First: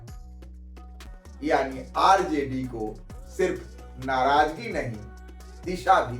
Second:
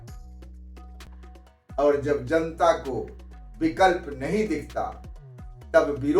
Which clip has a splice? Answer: first; 1 cut; at 1.1 s

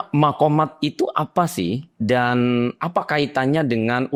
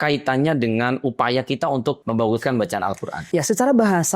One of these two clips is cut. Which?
second; 2 cuts; at 2.0 s, 3.1 s

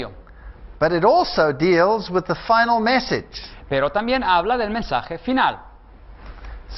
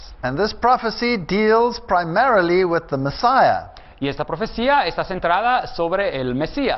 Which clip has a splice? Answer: second; 1 cut; at 3.3 s

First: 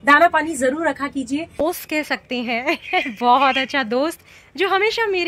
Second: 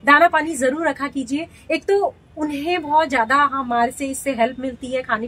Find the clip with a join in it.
first; 1 cut; at 1.7 s

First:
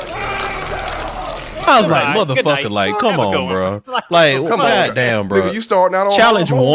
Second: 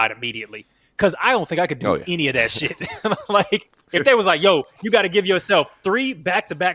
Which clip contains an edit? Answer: second; 1 cut; at 4.1 s

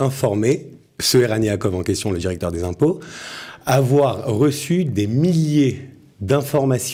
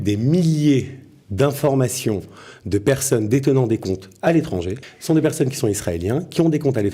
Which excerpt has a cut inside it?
second; 1 cut; at 4.8 s

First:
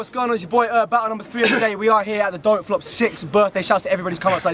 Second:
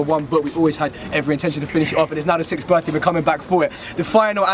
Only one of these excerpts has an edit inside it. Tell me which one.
second; 1 cut; at 3.2 s

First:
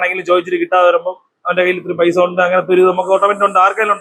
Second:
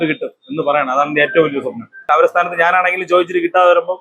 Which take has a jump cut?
second; 1 cut; at 1.9 s

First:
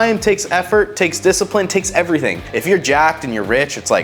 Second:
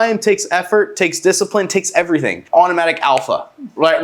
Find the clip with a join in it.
first; 1 cut; at 2.4 s

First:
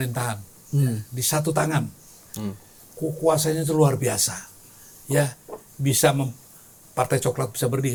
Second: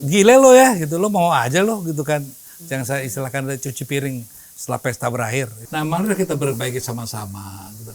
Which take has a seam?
second; 1 cut; at 5.6 s

